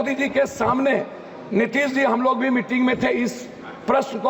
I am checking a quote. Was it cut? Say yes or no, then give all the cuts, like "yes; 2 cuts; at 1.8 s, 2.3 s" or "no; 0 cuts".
no; 0 cuts